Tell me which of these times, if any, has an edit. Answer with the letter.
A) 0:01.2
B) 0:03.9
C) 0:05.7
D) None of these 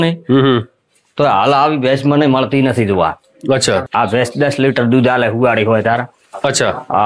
B